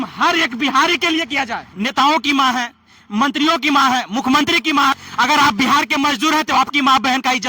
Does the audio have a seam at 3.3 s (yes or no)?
no